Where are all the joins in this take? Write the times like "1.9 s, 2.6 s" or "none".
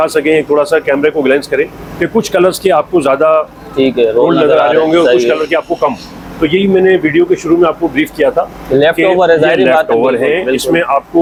none